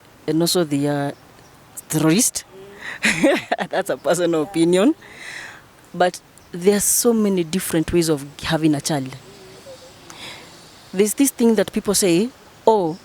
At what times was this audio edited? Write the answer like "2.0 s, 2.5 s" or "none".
none